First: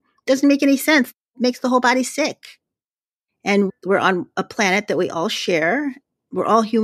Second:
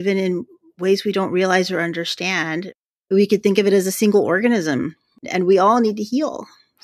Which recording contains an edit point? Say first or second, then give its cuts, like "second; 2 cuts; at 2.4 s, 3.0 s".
first; 2 cuts; at 1.2 s, 2.8 s